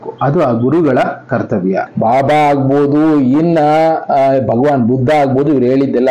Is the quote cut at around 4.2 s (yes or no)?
no